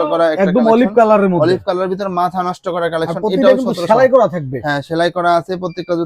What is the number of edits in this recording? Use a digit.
0